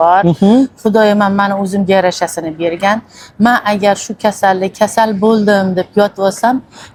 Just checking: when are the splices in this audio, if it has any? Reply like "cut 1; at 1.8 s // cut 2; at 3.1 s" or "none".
none